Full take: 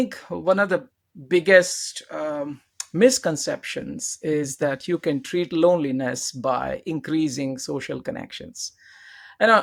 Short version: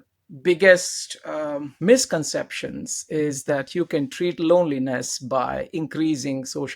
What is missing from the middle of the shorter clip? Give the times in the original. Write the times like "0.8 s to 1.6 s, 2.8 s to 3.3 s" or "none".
2.5 s to 2.8 s